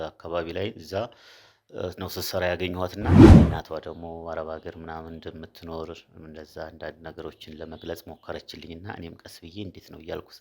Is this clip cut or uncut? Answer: cut